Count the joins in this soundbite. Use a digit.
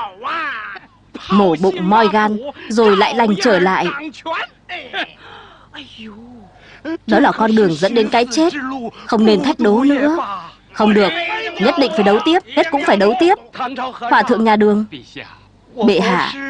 0